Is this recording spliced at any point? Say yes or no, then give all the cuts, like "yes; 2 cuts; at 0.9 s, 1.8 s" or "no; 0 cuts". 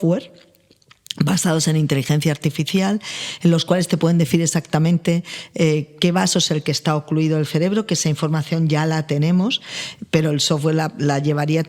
no; 0 cuts